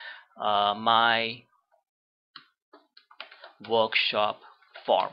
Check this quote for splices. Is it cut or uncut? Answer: uncut